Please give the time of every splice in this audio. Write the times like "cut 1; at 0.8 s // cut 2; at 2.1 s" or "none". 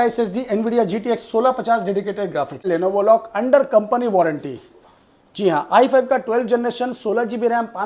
cut 1; at 2.6 s